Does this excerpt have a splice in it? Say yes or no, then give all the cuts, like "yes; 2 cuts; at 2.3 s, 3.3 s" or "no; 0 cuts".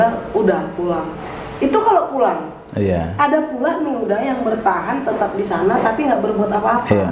no; 0 cuts